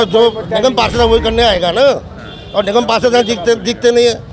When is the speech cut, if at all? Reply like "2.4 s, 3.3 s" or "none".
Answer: none